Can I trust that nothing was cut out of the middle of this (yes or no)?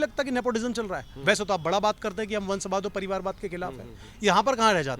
yes